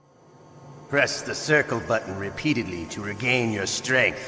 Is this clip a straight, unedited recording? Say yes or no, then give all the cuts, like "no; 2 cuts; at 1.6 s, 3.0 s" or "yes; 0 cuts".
no; 1 cut; at 0.9 s